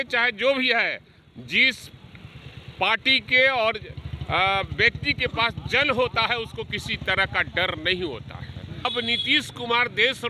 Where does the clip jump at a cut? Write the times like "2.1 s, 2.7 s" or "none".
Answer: 8.8 s